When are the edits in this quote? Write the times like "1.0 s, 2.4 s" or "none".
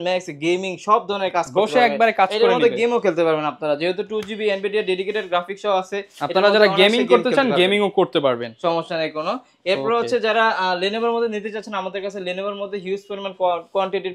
none